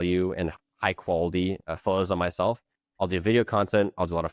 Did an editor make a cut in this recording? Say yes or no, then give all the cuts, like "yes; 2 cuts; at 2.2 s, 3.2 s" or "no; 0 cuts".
no; 0 cuts